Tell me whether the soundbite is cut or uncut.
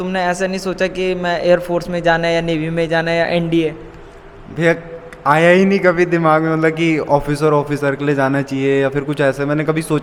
uncut